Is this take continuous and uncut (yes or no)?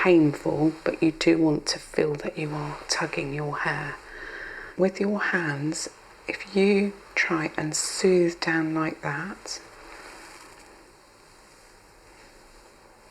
no